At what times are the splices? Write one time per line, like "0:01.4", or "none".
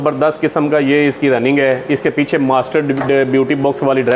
none